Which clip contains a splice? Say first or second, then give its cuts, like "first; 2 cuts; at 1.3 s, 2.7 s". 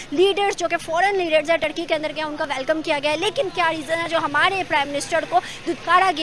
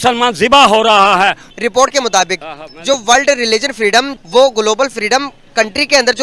second; 2 cuts; at 1.5 s, 4.2 s